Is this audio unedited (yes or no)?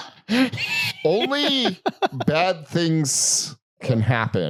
yes